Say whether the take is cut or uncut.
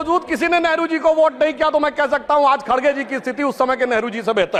uncut